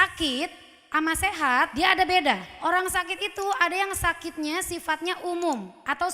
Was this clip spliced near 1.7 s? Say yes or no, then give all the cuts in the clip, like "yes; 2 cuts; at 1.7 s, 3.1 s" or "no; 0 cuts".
yes; 2 cuts; at 1.7 s, 2.5 s